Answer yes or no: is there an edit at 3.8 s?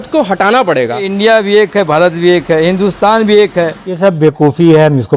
yes